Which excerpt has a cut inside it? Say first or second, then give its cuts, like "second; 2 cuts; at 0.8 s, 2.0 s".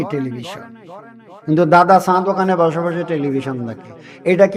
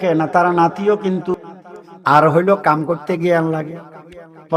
second; 1 cut; at 1.3 s